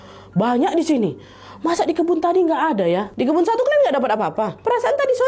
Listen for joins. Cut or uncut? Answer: cut